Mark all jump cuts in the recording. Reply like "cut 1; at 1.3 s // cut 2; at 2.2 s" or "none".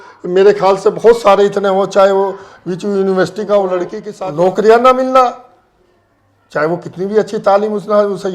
cut 1; at 4.0 s